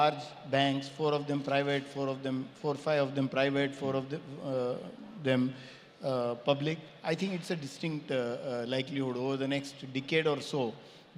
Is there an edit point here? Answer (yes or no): no